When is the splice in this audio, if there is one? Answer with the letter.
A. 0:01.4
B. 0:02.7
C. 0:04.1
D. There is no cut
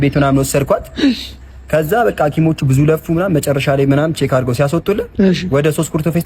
D